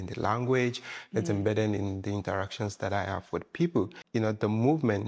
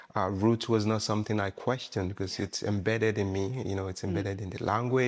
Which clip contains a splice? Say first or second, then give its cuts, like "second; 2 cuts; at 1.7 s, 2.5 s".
first; 1 cut; at 4.0 s